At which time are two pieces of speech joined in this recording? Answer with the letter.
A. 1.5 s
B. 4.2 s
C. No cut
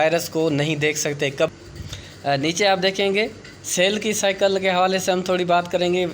A